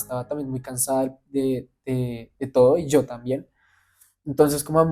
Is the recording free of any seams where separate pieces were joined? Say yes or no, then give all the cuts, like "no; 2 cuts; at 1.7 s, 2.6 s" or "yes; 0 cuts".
yes; 0 cuts